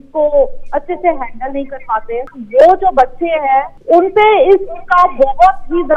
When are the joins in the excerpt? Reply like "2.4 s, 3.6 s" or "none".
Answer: 2.3 s, 3.7 s